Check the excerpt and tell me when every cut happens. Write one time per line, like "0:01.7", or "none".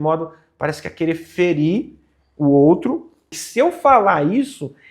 0:03.4